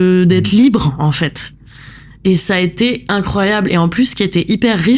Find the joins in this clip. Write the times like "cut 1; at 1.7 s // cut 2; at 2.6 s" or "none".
none